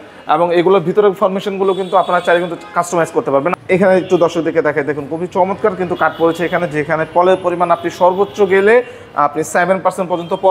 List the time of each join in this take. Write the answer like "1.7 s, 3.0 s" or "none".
3.5 s